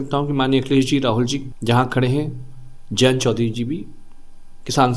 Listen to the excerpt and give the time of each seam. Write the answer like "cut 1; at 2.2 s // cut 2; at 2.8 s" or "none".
cut 1; at 1.5 s